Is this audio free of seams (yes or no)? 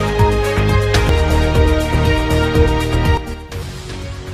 no